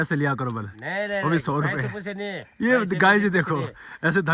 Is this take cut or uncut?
uncut